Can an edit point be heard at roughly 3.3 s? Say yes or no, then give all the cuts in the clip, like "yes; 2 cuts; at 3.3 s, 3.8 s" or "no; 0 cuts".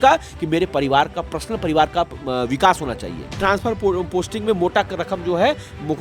yes; 1 cut; at 3.3 s